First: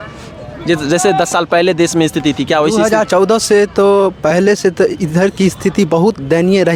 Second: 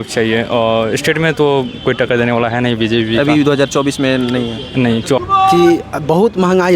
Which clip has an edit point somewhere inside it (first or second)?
second